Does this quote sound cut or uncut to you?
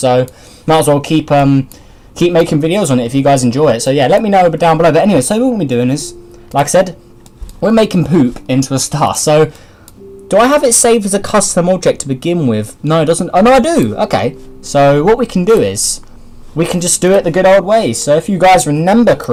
uncut